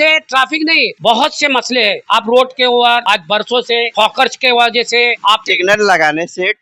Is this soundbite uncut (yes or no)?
no